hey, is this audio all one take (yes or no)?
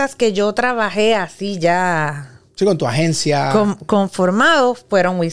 yes